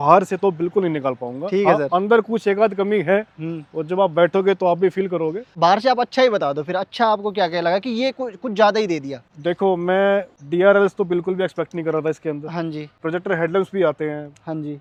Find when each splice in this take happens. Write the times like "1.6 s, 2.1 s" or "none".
none